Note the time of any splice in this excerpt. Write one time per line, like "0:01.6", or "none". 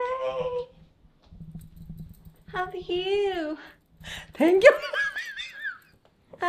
none